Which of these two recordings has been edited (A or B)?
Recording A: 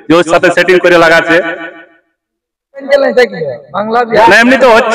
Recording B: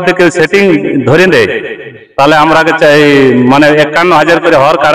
A